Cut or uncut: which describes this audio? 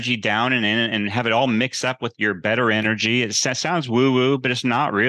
uncut